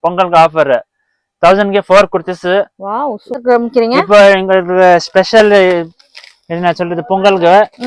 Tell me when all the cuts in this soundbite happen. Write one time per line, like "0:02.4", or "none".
0:03.3